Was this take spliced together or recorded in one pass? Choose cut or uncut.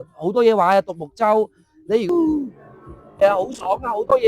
cut